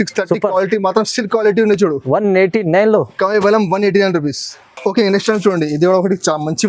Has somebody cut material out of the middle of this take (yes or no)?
no